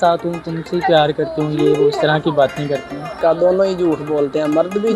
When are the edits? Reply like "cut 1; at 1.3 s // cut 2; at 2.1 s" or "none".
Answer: cut 1; at 3.2 s